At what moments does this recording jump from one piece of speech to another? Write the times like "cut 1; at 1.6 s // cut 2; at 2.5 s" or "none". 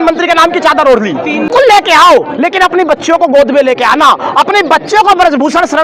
cut 1; at 1.5 s